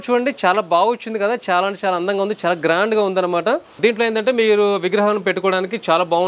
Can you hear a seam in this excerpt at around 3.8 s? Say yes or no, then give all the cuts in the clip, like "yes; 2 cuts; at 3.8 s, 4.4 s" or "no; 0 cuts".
yes; 1 cut; at 3.8 s